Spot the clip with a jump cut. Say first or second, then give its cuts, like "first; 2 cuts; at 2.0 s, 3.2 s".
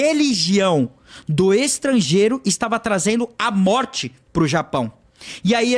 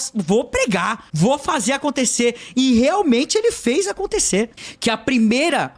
second; 2 cuts; at 1.0 s, 4.6 s